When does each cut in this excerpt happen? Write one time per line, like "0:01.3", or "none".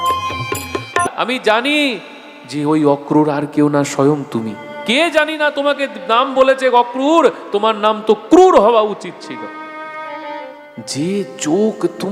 0:01.1